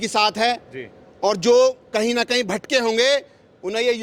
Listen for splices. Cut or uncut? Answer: uncut